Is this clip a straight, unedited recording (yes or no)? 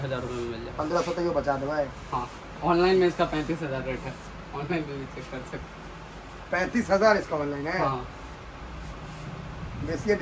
yes